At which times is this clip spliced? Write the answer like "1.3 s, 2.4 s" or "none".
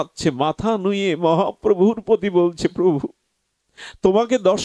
none

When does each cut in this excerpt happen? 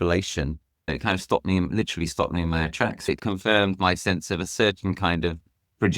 3.1 s

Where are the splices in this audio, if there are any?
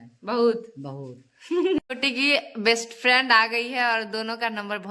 1.8 s

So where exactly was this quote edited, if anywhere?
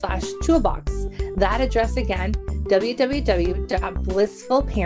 none

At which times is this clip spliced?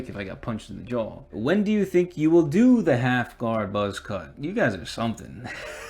1.2 s

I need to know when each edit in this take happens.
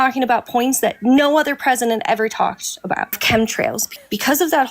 3.2 s, 3.9 s

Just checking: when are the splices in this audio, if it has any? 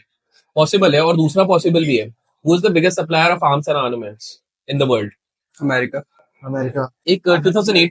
6.9 s

